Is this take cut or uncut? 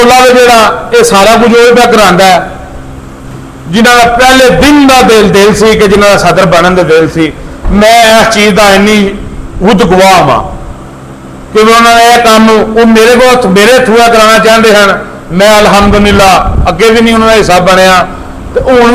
uncut